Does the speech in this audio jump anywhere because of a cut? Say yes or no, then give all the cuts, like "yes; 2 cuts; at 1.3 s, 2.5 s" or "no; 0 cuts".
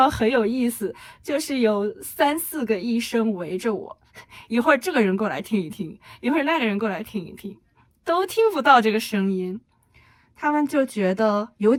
no; 0 cuts